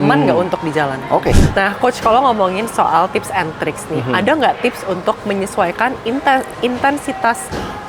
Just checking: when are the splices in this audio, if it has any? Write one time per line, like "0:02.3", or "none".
0:01.4